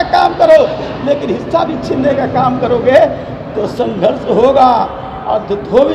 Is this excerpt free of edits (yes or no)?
yes